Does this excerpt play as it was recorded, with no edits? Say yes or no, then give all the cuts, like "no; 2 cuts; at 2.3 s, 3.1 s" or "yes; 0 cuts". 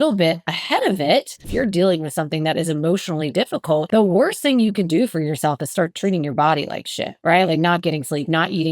no; 2 cuts; at 1.5 s, 3.9 s